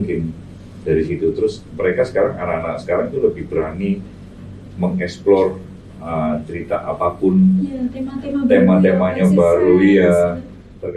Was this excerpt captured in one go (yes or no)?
yes